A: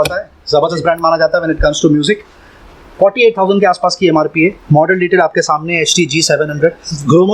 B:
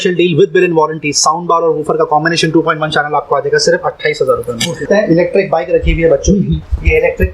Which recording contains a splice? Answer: B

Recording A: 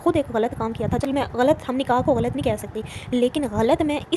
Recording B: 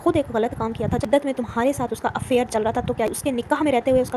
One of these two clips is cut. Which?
B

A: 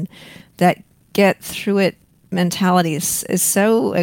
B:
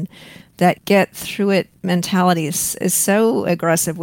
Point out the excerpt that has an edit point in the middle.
B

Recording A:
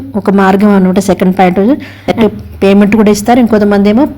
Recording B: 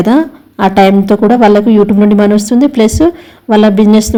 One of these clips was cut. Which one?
A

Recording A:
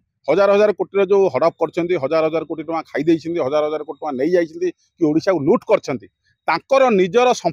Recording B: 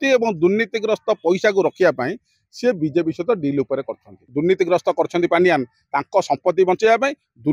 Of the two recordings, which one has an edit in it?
B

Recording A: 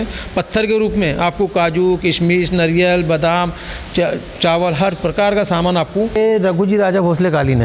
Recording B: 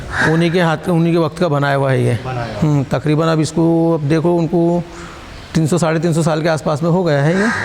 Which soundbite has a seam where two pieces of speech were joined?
A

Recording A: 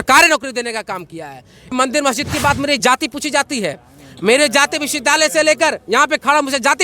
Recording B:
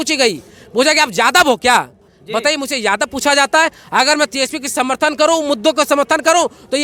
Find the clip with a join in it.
A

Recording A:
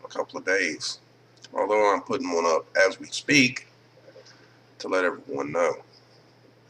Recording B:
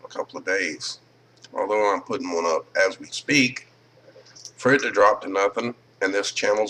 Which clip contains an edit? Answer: A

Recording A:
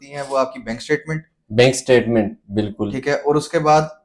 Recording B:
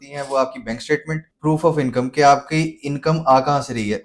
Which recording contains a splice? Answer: B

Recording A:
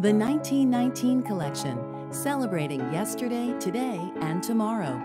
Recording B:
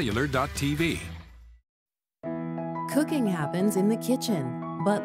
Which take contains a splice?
B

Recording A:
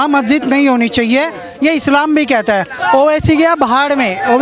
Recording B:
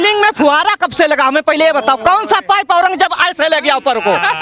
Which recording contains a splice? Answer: A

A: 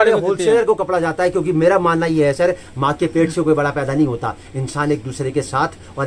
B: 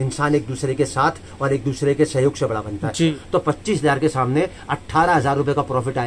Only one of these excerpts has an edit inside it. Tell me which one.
B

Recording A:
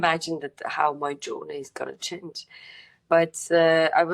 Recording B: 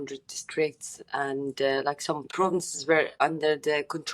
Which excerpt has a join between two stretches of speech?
B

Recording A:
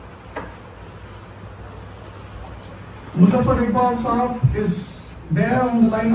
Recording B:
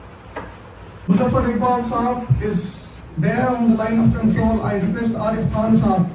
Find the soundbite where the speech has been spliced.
B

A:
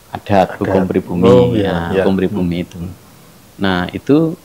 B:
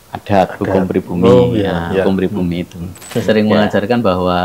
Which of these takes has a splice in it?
B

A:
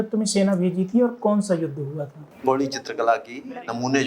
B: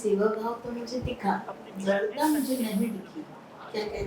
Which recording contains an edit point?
A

